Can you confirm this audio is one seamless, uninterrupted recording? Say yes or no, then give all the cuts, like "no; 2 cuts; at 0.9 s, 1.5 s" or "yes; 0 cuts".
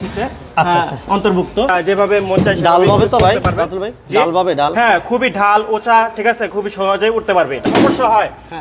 no; 2 cuts; at 1.7 s, 7.7 s